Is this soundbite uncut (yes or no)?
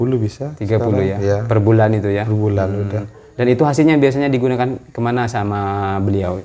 yes